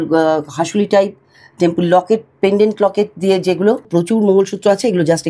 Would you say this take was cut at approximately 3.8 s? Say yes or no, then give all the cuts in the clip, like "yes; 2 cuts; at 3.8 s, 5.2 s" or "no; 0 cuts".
yes; 1 cut; at 3.8 s